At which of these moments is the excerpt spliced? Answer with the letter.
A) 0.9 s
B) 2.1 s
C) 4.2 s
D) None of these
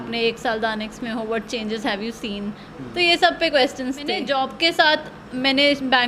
C